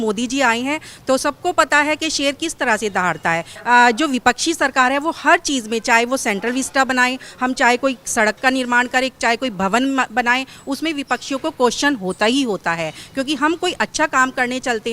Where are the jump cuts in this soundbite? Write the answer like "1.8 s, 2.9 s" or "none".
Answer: 3.5 s